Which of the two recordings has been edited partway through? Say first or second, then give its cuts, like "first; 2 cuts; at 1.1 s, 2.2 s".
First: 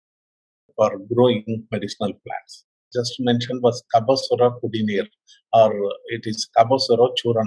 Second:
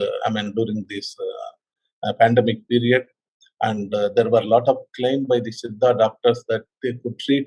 first; 1 cut; at 2.8 s